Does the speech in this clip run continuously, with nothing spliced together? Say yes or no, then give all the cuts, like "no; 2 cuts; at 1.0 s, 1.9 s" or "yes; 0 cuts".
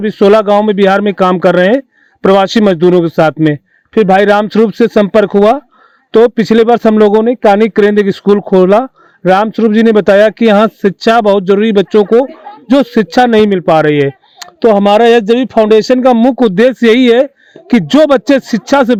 yes; 0 cuts